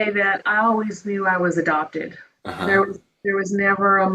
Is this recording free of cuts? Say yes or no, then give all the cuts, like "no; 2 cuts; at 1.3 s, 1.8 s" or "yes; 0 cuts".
yes; 0 cuts